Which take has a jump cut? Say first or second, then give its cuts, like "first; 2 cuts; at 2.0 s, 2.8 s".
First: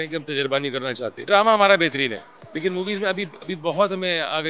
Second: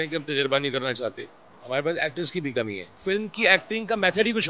second; 2 cuts; at 1.2 s, 2.9 s